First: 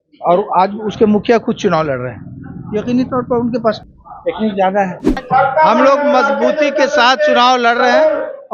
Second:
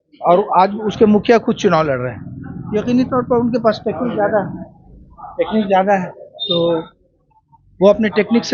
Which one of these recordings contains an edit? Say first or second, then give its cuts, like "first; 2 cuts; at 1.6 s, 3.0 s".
first; 2 cuts; at 3.8 s, 5.2 s